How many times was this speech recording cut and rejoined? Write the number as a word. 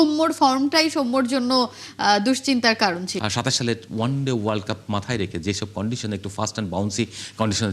one